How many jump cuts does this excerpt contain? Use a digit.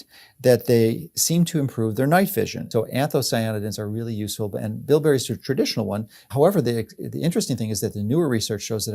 1